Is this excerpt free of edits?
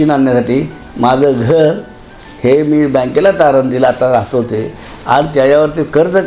yes; 0 cuts

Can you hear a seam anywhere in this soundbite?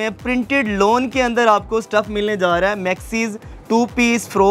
no; 0 cuts

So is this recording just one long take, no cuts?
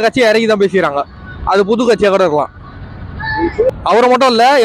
no; 1 cut; at 3.7 s

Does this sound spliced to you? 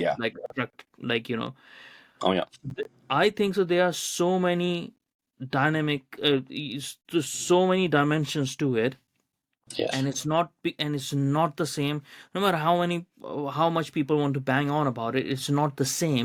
no; 0 cuts

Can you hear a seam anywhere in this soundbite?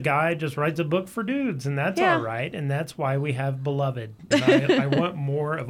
yes; 1 cut; at 4.2 s

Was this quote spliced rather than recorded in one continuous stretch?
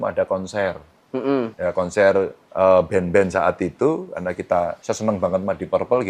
yes; 3 cuts; at 1.5 s, 2.4 s, 4.8 s

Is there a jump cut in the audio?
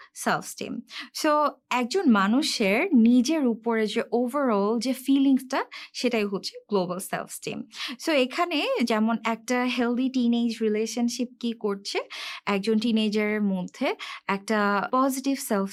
no; 0 cuts

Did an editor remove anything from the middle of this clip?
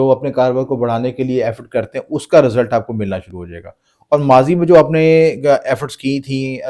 no; 0 cuts

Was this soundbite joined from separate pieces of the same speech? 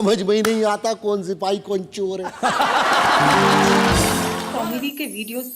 yes; 1 cut; at 4.4 s

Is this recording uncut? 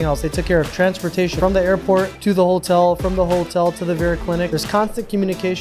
no; 3 cuts; at 1.4 s, 2.1 s, 4.5 s

